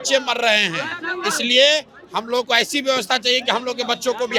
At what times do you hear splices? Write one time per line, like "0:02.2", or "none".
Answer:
none